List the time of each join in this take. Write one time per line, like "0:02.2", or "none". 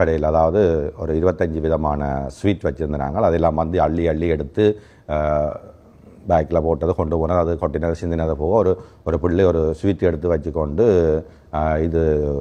none